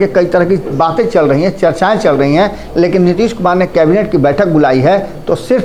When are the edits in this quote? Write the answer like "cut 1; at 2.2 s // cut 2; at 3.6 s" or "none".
none

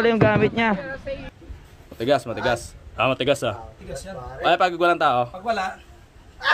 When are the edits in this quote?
cut 1; at 1.2 s

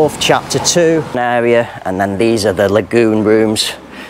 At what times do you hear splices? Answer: cut 1; at 1.2 s

